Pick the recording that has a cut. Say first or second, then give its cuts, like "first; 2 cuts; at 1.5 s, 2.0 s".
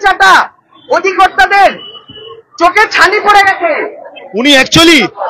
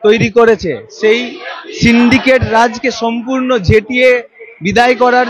first; 1 cut; at 4.2 s